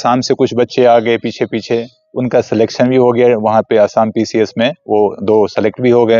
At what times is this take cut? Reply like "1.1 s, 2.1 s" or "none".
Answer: none